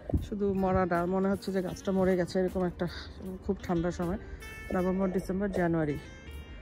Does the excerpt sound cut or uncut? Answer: uncut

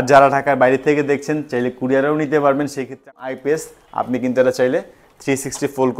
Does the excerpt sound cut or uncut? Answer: cut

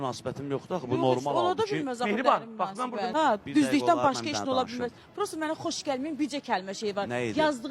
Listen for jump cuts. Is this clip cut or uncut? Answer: cut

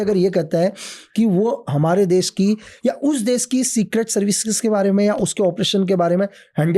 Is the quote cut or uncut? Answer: uncut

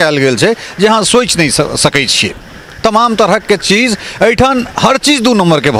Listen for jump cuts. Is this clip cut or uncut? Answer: uncut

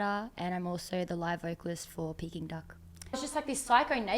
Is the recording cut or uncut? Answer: cut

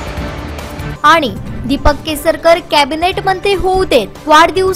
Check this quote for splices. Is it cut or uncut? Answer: cut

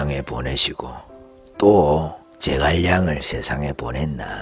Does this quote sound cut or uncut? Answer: uncut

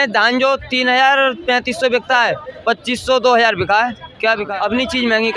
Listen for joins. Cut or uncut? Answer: cut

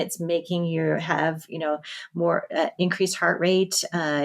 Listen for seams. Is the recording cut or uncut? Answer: uncut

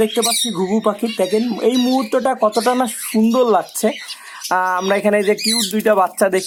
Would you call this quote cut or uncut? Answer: uncut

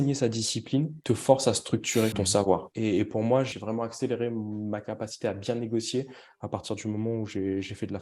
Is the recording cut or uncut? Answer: cut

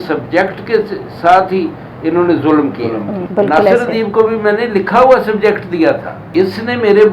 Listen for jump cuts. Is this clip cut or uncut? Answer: cut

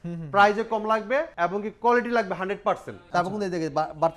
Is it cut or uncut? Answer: cut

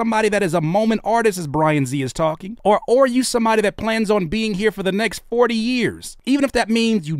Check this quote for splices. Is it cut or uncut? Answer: uncut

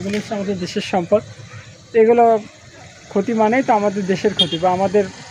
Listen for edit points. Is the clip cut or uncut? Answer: uncut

